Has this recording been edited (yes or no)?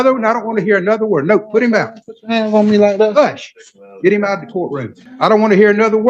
yes